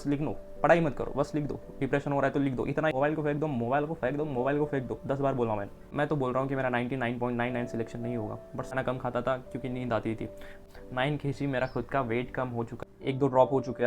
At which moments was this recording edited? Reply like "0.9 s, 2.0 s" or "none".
2.9 s, 5.9 s, 8.7 s, 10.6 s, 12.7 s